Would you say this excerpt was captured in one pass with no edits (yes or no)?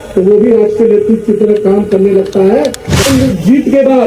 no